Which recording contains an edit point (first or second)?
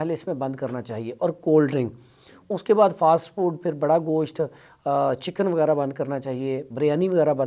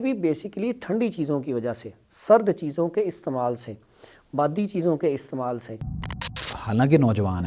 second